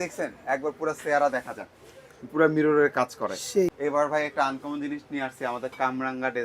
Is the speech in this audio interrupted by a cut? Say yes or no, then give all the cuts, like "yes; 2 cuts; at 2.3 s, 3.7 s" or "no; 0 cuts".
yes; 1 cut; at 3.8 s